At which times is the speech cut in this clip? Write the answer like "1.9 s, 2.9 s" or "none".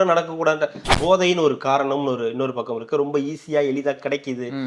0.9 s